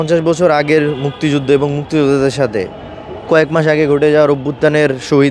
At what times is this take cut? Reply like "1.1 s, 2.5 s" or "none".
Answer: none